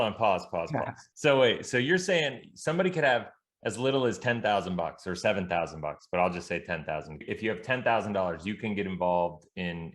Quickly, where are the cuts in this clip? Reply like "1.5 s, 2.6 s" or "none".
1.0 s, 7.3 s